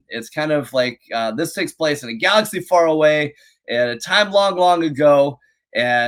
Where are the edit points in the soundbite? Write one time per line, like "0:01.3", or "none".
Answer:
none